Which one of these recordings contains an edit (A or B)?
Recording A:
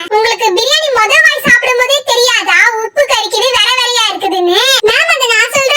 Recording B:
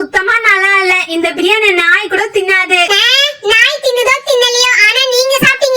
A